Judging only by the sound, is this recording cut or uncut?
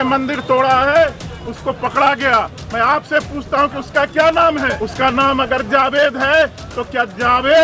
cut